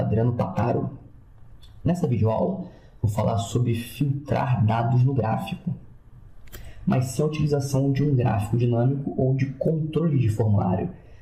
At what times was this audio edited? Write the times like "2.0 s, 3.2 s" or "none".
2.0 s